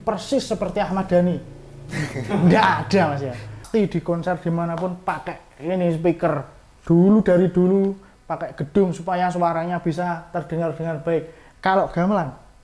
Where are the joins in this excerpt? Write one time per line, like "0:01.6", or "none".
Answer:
0:03.5

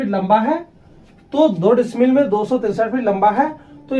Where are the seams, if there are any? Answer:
none

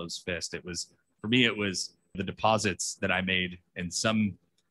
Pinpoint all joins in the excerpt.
0:02.2

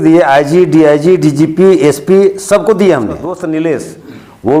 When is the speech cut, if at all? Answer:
0:03.3

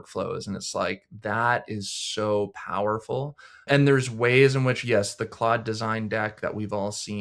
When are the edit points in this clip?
0:03.6

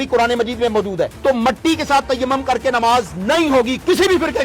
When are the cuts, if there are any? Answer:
0:01.2

